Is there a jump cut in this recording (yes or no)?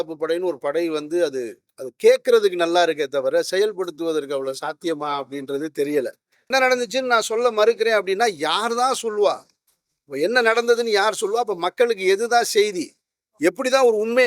yes